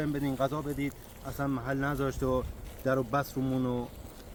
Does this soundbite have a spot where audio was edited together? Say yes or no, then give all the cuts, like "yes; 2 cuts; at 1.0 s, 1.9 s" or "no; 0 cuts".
no; 0 cuts